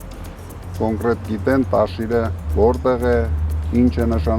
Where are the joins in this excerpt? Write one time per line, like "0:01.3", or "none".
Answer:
0:02.4

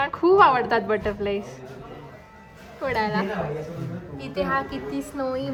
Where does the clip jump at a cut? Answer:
none

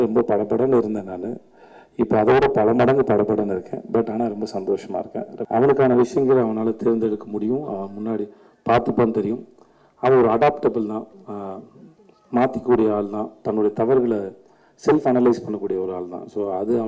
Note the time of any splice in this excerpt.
0:05.4

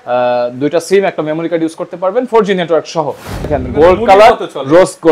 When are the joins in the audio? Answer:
0:03.5

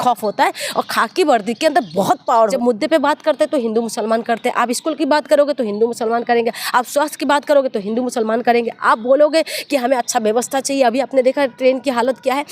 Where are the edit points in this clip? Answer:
0:02.5

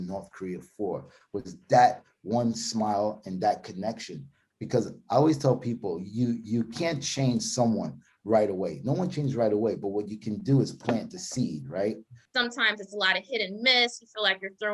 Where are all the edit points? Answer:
0:12.1

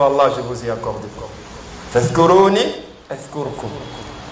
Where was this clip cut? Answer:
0:01.8
0:02.9

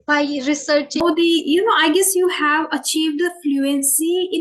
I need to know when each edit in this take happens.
0:01.0

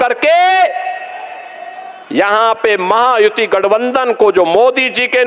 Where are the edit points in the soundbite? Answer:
none

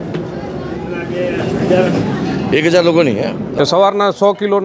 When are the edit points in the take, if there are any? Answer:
0:03.5

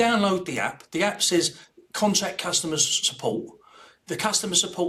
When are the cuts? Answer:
none

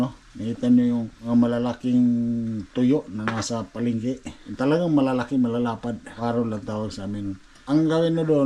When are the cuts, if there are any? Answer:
0:01.1
0:04.4
0:06.1
0:07.5

